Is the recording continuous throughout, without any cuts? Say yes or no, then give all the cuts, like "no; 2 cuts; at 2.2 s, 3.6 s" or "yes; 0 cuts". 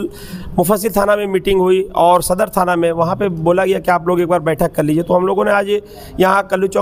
yes; 0 cuts